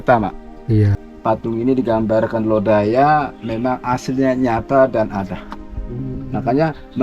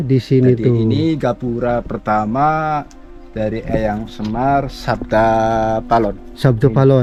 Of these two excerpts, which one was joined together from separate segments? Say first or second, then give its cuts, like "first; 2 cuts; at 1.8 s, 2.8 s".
first; 1 cut; at 1.0 s